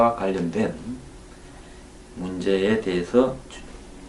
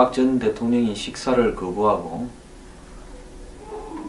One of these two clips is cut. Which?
first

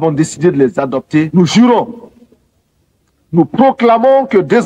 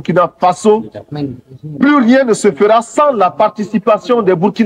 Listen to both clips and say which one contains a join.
first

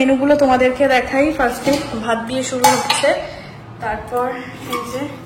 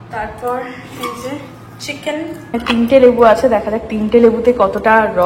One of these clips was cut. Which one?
second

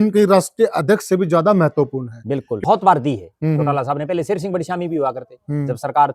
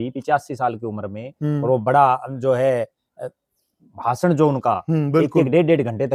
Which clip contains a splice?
first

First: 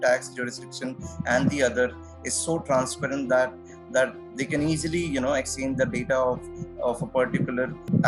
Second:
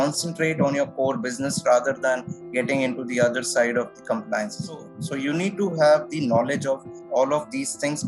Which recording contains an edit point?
second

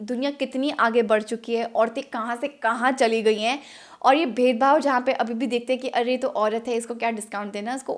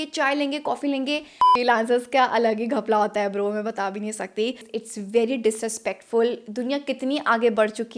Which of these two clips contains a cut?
second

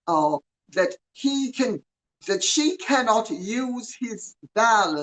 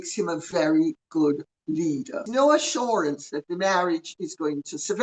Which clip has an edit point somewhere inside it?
second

